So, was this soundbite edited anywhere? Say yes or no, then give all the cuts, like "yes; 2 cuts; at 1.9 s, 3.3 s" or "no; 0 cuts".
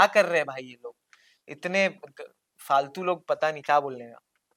no; 0 cuts